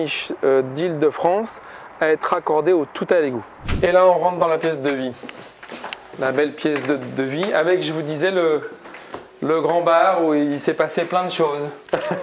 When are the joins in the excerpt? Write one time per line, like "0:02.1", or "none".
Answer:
0:03.6